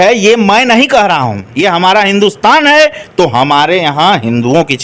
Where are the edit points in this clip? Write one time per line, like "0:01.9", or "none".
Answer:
0:01.4